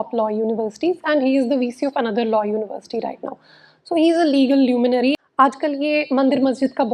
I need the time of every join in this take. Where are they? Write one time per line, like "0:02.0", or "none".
0:05.2